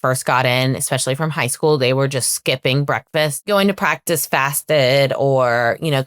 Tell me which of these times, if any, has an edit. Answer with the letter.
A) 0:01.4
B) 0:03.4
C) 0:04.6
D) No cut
B